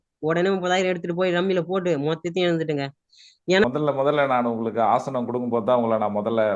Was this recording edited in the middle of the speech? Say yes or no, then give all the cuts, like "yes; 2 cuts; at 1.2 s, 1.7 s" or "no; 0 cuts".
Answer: yes; 1 cut; at 3.6 s